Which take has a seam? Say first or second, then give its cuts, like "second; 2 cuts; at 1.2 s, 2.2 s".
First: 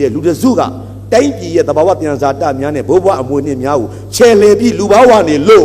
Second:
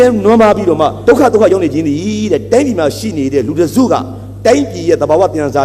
second; 1 cut; at 1.0 s